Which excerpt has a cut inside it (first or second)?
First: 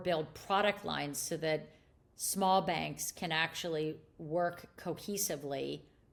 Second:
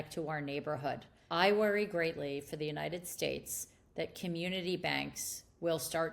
second